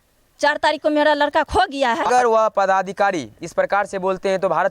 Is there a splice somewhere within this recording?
yes; 1 cut; at 2.1 s

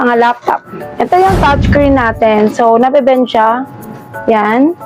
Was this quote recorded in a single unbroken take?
no; 1 cut; at 1.1 s

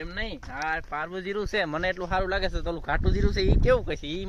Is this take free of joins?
yes; 0 cuts

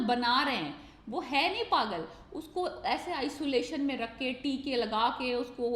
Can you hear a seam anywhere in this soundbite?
no; 0 cuts

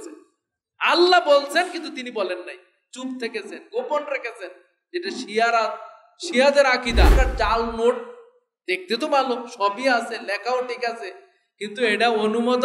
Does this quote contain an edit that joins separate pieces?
yes; 1 cut; at 7.1 s

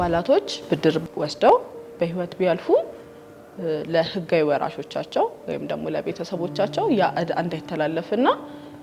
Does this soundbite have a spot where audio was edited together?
yes; 1 cut; at 1.1 s

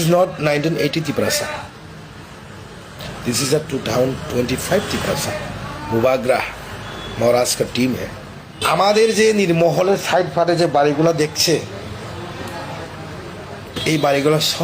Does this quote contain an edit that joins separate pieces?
yes; 1 cut; at 8.6 s

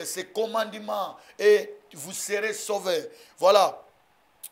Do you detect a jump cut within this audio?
no; 0 cuts

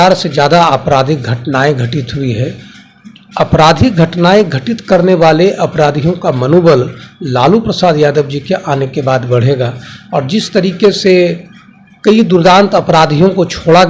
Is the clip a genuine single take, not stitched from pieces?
yes; 0 cuts

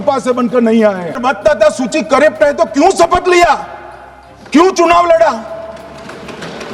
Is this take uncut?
no; 1 cut; at 1.2 s

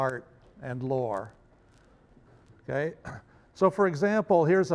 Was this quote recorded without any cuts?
no; 1 cut; at 1.0 s

